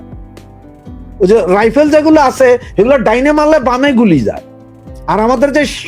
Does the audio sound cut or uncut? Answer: uncut